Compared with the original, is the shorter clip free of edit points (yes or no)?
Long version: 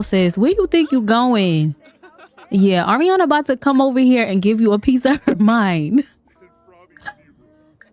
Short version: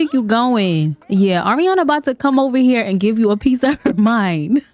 no